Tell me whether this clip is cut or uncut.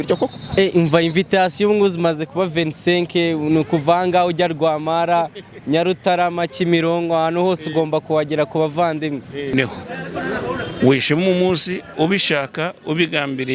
cut